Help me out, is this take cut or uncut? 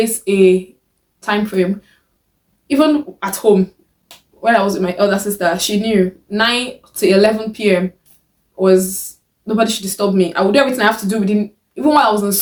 uncut